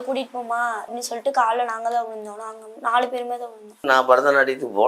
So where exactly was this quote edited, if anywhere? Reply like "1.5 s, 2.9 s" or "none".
0.9 s, 3.7 s